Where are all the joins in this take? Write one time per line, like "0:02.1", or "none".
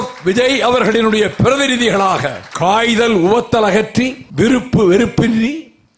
0:02.4